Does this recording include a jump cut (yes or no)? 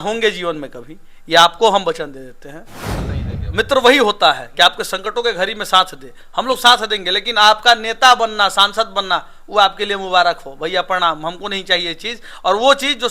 yes